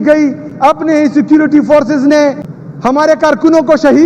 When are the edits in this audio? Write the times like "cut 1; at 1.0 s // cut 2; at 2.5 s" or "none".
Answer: cut 1; at 2.9 s